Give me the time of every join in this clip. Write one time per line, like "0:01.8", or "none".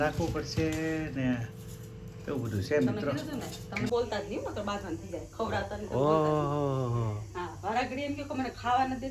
0:03.9